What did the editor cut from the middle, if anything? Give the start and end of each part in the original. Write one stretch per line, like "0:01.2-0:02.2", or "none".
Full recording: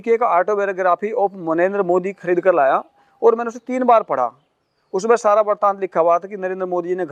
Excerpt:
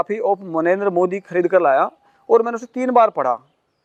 none